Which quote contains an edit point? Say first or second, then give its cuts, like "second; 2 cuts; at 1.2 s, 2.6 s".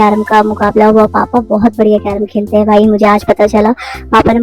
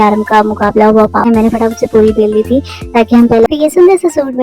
second; 2 cuts; at 1.3 s, 3.5 s